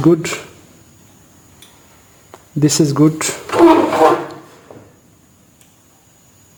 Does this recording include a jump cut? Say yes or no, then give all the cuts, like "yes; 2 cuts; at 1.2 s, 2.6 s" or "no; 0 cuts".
no; 0 cuts